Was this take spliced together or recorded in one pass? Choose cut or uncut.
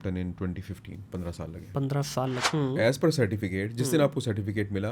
cut